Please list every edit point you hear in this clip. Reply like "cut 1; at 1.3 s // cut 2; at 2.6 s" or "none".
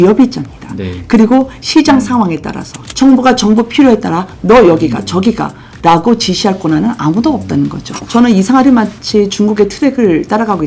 cut 1; at 2.8 s // cut 2; at 7.9 s